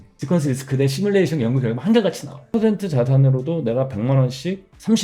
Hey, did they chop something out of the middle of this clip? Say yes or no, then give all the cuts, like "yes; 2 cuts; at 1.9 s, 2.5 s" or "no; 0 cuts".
yes; 1 cut; at 2.5 s